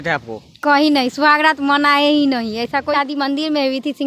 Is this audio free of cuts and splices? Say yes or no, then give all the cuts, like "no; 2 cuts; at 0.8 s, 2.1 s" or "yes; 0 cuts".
no; 1 cut; at 2.9 s